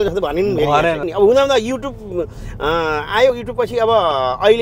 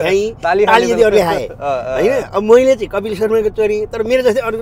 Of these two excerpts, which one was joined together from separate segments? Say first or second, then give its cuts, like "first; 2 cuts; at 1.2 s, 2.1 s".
first; 1 cut; at 1.1 s